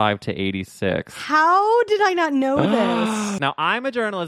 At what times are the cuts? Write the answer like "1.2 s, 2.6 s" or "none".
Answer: 3.4 s